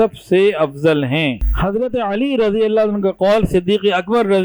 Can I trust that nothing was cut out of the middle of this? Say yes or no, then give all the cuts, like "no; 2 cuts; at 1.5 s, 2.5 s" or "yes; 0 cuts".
no; 1 cut; at 1.5 s